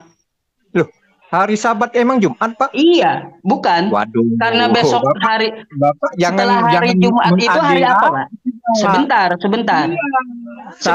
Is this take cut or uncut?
uncut